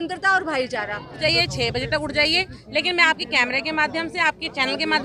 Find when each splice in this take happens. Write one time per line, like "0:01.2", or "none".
0:01.1